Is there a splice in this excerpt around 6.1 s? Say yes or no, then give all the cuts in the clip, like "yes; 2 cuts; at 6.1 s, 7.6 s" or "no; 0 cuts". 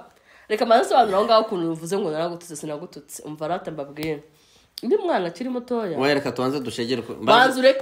no; 0 cuts